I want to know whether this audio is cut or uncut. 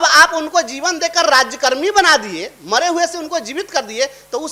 uncut